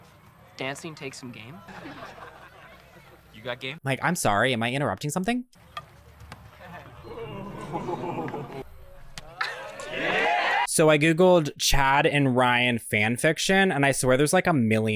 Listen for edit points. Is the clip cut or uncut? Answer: uncut